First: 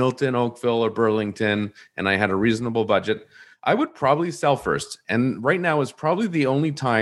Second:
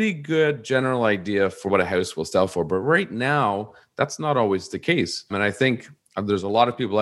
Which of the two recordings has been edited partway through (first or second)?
second